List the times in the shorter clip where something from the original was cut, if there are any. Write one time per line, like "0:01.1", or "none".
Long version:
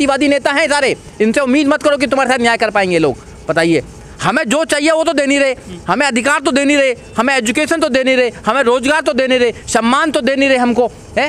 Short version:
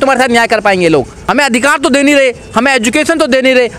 0:01.2